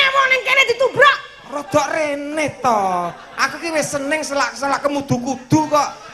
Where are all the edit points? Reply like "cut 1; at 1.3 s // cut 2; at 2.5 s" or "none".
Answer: none